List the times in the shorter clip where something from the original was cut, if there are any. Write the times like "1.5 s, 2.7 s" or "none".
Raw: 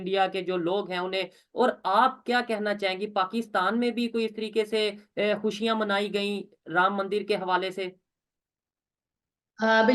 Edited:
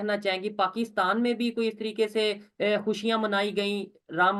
none